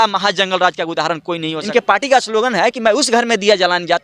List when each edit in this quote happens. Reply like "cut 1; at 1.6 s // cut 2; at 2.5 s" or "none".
cut 1; at 1.5 s